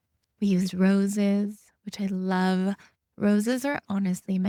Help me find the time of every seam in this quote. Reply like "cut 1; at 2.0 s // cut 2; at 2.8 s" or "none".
none

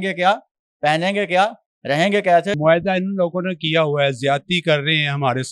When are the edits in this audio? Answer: cut 1; at 2.6 s

